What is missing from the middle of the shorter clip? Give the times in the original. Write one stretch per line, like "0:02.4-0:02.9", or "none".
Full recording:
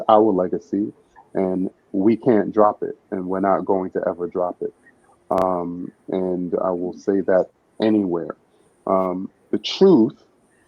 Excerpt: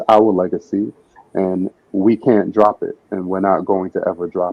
none